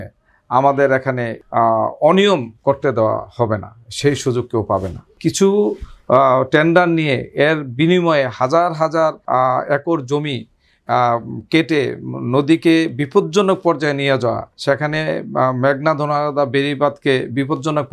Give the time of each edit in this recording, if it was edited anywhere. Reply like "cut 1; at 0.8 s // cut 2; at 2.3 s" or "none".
cut 1; at 1.3 s // cut 2; at 5.1 s // cut 3; at 9.2 s // cut 4; at 14.5 s